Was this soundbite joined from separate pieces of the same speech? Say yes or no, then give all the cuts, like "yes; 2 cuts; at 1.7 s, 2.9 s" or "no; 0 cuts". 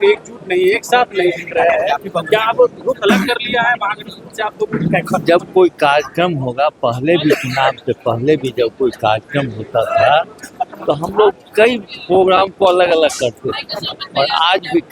no; 0 cuts